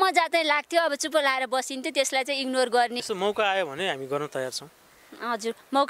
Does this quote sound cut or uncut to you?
cut